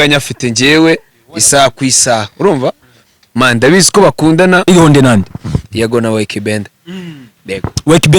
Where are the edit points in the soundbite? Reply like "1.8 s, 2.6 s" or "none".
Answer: 4.7 s